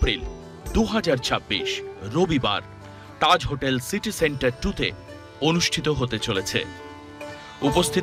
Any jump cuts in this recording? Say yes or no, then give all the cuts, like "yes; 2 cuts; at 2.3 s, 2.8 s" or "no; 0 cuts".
no; 0 cuts